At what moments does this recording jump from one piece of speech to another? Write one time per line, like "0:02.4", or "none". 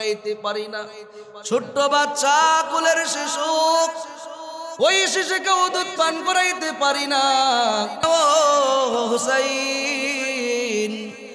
0:08.0